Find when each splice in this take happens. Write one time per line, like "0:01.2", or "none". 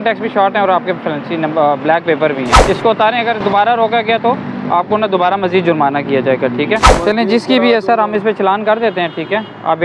0:02.6
0:07.0